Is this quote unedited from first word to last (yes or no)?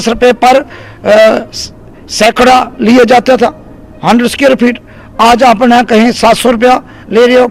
yes